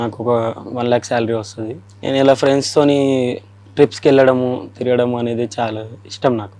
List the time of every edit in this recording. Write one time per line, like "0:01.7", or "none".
none

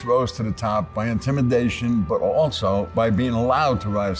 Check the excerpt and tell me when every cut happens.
0:02.9

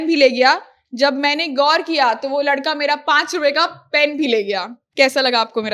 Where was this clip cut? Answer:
0:04.8

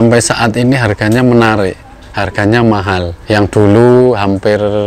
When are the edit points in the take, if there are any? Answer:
0:03.1

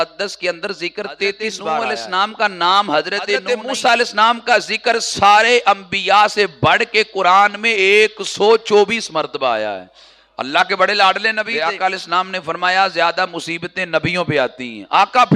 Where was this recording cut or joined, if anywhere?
0:01.8
0:03.4
0:11.4

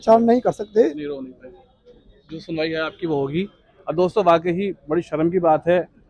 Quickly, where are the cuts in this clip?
none

